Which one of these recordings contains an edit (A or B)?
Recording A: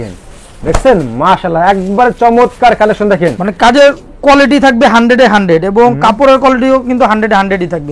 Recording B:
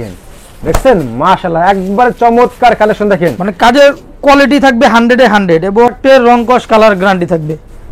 B